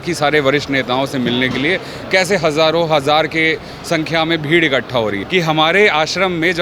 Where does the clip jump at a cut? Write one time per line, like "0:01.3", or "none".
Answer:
0:05.2